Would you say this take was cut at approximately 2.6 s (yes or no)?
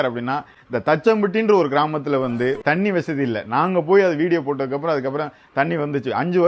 yes